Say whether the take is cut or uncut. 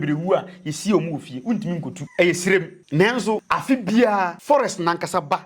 cut